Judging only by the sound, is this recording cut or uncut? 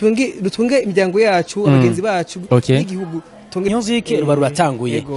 cut